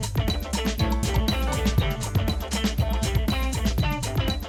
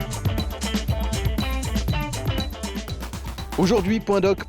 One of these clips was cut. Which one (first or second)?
second